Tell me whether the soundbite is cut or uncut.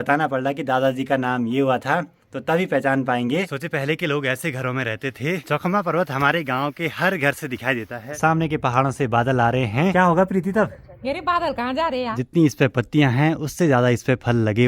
cut